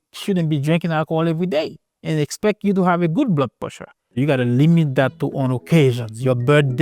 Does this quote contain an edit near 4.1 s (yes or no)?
yes